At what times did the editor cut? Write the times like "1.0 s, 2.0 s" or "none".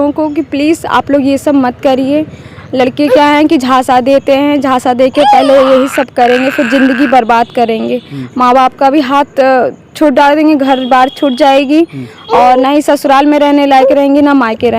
none